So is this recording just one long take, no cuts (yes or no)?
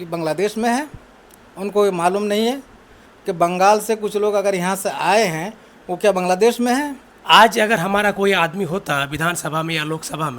no